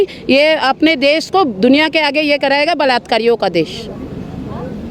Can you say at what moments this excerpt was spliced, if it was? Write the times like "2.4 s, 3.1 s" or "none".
none